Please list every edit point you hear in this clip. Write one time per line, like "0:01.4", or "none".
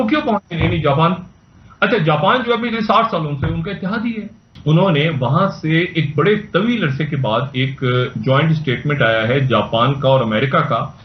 0:04.5